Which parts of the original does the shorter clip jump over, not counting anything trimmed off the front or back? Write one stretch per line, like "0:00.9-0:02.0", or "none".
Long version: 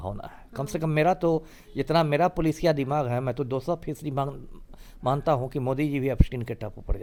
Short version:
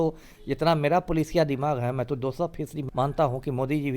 0:04.1-0:04.9